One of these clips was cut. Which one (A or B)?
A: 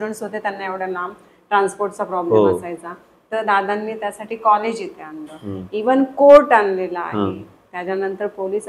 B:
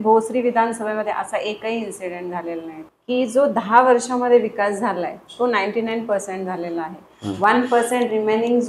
B